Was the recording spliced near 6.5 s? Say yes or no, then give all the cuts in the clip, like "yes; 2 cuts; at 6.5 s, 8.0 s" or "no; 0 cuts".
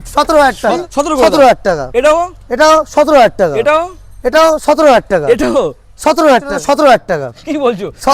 yes; 2 cuts; at 0.8 s, 6.5 s